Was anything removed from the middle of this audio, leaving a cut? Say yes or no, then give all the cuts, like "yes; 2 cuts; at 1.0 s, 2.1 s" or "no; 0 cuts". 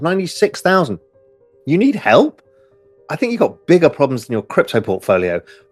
no; 0 cuts